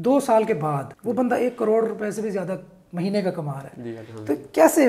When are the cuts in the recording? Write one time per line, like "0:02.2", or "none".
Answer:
0:00.9